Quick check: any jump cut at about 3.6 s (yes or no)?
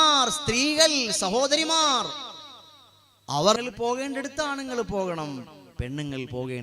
yes